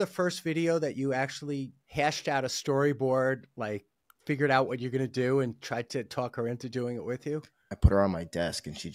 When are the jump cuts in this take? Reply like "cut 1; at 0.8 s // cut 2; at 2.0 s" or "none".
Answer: cut 1; at 1.8 s // cut 2; at 7.7 s